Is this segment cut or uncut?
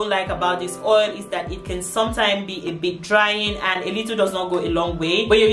uncut